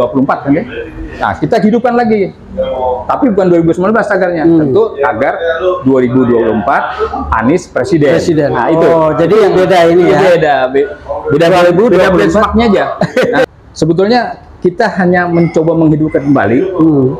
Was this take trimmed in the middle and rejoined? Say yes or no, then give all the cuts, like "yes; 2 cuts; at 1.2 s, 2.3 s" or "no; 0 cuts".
yes; 1 cut; at 13.5 s